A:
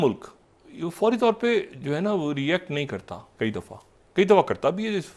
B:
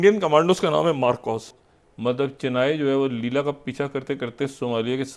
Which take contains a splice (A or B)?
B